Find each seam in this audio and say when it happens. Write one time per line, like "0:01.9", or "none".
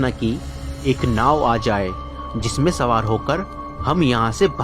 none